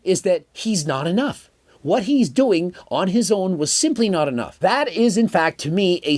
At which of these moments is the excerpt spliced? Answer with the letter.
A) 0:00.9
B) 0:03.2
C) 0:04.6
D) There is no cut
C